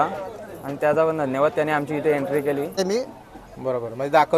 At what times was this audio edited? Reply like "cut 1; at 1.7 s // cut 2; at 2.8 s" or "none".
cut 1; at 2.8 s